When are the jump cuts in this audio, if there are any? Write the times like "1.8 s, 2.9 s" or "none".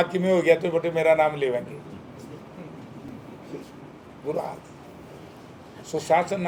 none